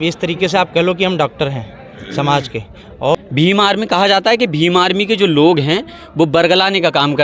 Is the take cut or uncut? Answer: cut